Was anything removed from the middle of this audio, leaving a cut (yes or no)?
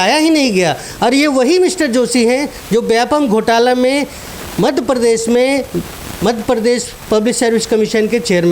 no